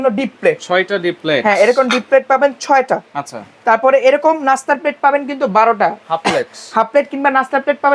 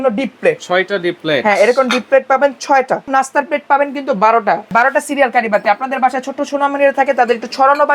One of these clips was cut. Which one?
second; 2 cuts; at 3.1 s, 4.7 s

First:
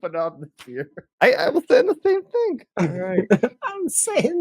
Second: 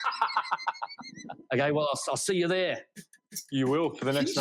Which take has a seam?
first; 2 cuts; at 1.0 s, 2.6 s

